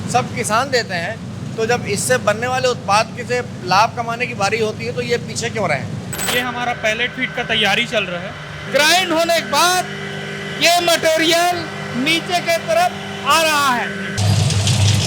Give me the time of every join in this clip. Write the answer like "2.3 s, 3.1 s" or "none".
6.1 s, 8.5 s, 14.2 s